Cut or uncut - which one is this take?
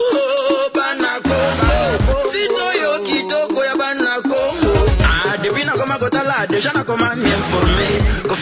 uncut